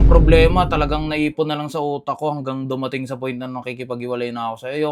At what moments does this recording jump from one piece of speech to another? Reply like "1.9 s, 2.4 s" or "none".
none